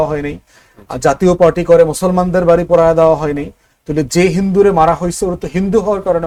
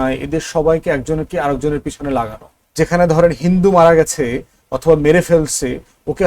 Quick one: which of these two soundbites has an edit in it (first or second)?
second